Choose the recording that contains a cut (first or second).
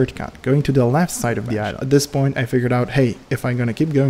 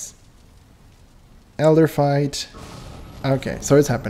first